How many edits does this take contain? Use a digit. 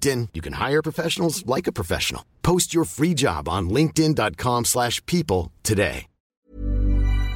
1